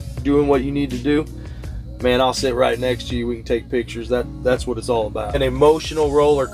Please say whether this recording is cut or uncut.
cut